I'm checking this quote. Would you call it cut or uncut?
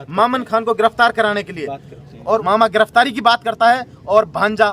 cut